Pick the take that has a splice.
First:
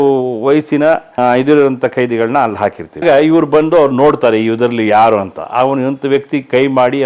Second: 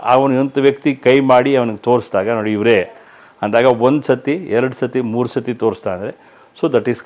first; 2 cuts; at 1.1 s, 3.0 s

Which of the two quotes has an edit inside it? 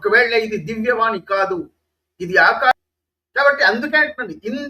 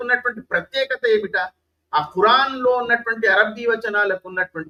first; 1 cut; at 2.7 s

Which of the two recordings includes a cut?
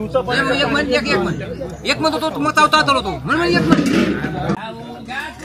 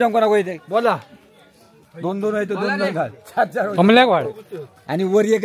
first; 1 cut; at 4.6 s

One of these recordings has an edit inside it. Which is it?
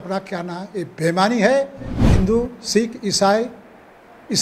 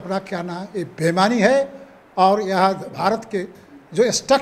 first; 1 cut; at 2.0 s

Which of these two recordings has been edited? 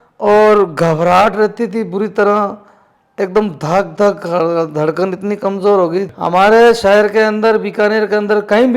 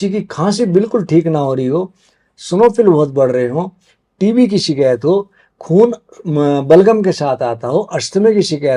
first; 1 cut; at 6.1 s

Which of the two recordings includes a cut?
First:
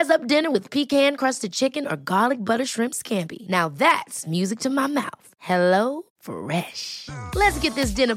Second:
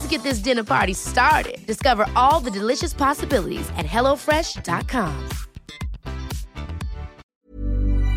second; 1 cut; at 7.2 s

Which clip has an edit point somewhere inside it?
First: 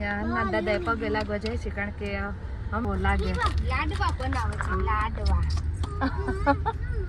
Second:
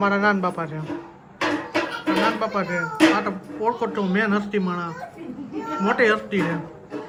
first; 1 cut; at 2.9 s

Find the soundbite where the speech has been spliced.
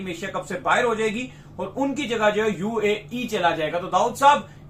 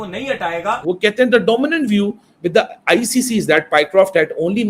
second; 1 cut; at 1.0 s

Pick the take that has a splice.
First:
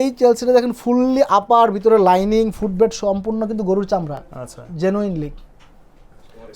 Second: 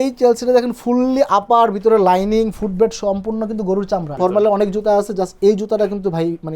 second; 1 cut; at 4.1 s

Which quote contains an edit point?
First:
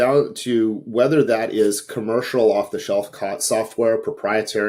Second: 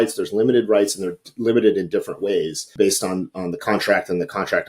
second; 1 cut; at 2.7 s

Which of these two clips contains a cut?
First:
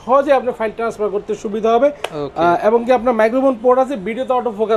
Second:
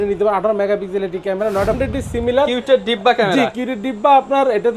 second; 1 cut; at 1.8 s

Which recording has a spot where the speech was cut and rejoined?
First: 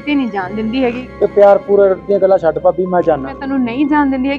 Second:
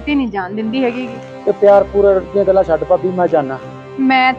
first; 2 cuts; at 1.0 s, 3.4 s

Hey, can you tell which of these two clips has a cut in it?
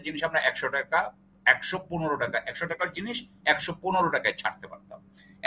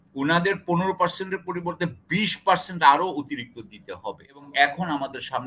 second; 1 cut; at 4.5 s

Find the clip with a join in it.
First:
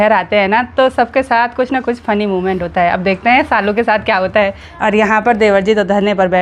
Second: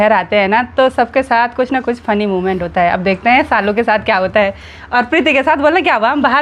first; 1 cut; at 4.7 s

